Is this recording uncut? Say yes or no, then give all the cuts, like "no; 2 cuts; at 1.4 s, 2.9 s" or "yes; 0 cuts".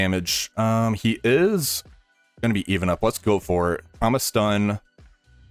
yes; 0 cuts